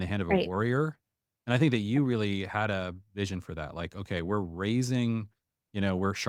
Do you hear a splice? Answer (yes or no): no